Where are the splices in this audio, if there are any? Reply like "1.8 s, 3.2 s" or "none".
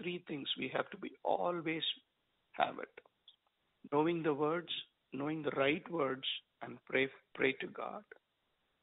7.2 s